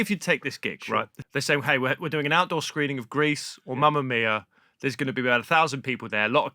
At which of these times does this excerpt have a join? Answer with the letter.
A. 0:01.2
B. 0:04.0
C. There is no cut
A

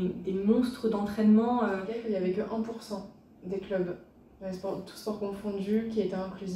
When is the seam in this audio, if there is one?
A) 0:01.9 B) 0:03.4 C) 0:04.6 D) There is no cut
A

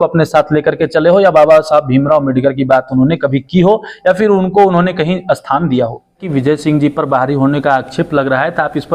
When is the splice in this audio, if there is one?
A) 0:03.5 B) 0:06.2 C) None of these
B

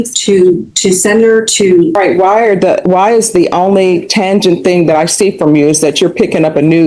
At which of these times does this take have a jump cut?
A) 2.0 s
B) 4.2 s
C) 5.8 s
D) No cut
A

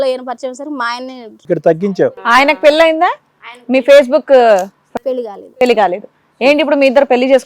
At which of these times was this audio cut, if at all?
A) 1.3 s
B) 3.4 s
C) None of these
A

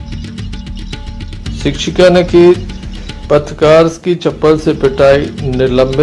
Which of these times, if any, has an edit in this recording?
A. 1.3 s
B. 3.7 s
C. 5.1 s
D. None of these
A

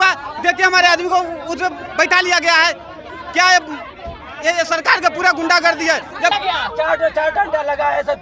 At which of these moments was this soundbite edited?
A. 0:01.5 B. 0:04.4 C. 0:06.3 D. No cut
C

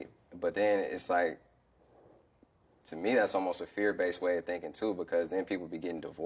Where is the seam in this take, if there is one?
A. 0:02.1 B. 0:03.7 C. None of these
C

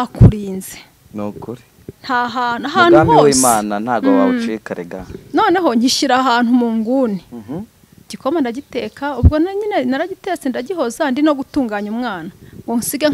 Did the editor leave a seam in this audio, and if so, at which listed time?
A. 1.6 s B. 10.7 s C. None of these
C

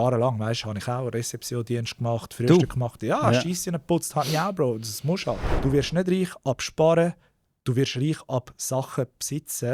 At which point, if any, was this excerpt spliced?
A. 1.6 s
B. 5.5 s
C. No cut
B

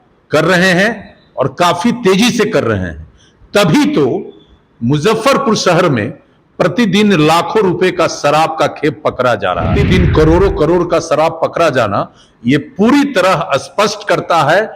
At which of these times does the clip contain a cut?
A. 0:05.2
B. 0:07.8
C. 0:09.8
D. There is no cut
C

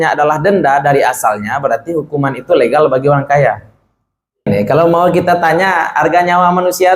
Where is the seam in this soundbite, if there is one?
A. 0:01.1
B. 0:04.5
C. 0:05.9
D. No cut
B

